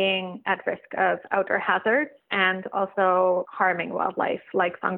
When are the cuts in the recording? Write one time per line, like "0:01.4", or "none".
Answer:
0:02.2
0:03.5